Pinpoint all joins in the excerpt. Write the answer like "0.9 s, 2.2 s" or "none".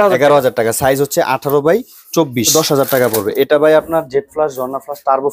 2.5 s